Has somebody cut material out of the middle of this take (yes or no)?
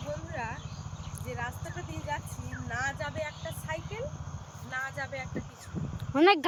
no